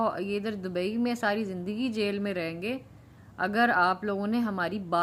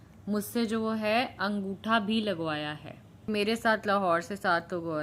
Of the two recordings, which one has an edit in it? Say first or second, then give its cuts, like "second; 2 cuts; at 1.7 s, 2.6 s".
second; 1 cut; at 3.3 s